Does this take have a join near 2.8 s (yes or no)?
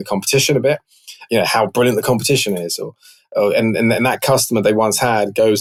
no